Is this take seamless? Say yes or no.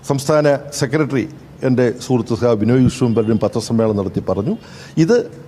yes